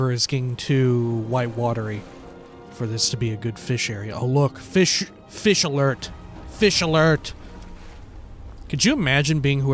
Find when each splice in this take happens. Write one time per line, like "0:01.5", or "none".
0:02.0